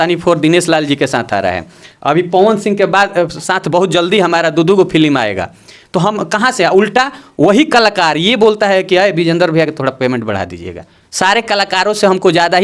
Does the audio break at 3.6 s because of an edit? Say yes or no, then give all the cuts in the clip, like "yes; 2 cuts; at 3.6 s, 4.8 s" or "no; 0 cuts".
no; 0 cuts